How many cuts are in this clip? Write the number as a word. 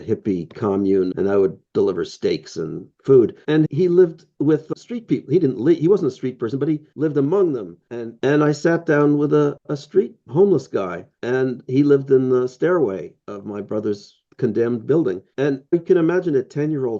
two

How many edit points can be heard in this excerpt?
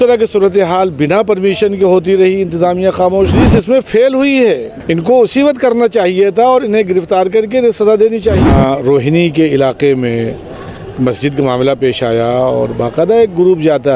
three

